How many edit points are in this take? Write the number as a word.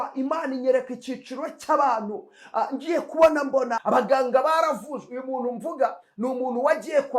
one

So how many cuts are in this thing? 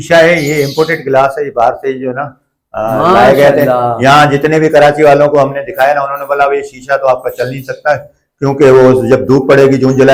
zero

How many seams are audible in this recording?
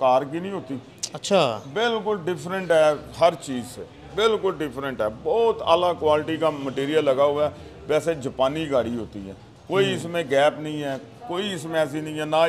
zero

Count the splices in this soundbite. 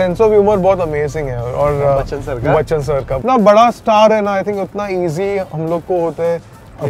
one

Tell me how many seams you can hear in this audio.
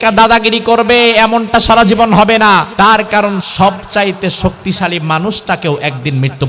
one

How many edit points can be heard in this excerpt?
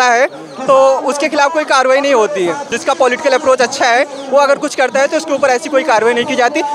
one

